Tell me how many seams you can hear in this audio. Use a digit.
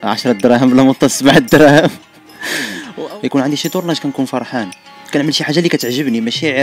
1